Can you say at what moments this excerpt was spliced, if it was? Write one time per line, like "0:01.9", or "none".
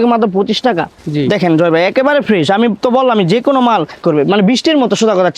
0:00.9
0:04.0

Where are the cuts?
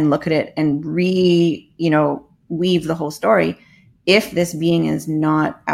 none

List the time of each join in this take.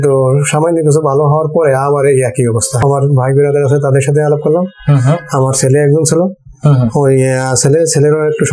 0:02.8

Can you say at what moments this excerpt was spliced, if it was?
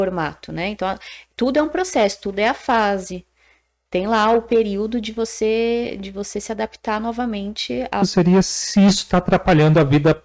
0:08.0

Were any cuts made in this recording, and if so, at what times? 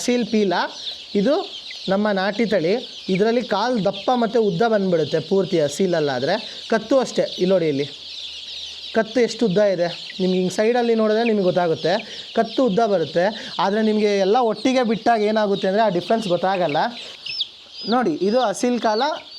none

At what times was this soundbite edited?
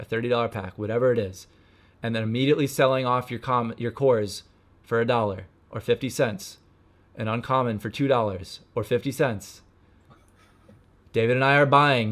none

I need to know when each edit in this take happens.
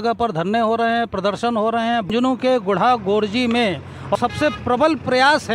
0:02.1
0:04.1

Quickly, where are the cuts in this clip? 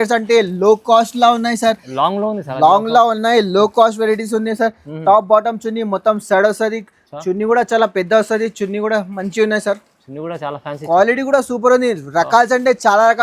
none

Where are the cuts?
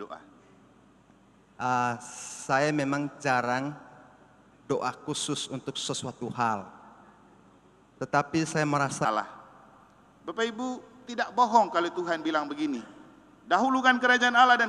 0:09.1

